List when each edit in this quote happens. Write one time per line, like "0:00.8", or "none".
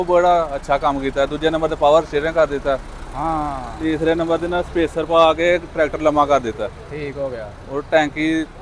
none